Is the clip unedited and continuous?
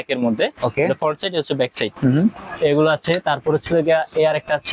yes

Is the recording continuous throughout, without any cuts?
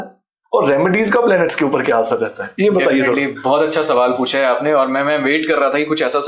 yes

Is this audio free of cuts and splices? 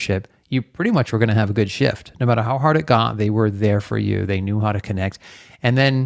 yes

